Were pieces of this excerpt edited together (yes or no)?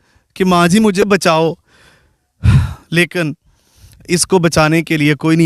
yes